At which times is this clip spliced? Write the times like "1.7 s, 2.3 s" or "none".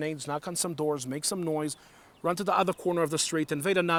none

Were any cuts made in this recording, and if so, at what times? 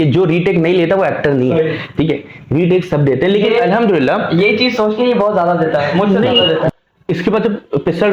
6.7 s

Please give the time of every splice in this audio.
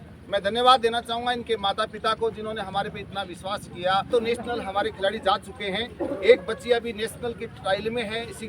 4.1 s

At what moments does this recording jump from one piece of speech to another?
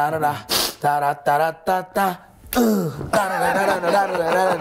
none

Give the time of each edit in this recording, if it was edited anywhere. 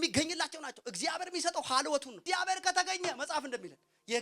2.2 s

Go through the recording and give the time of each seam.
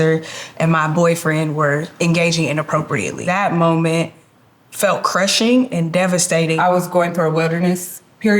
3.2 s, 6.6 s

